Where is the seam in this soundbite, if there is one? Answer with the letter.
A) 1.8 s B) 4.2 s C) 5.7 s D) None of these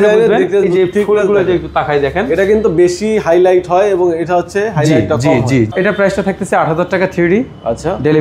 C